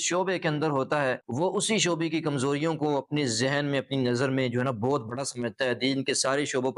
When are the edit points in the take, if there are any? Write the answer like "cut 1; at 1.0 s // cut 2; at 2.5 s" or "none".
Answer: none